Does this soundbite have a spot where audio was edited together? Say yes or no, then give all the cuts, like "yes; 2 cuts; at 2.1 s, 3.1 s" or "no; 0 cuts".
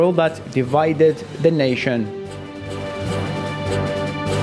no; 0 cuts